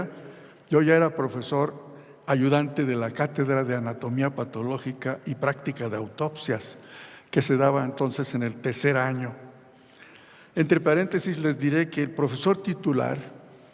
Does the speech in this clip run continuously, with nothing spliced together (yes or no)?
yes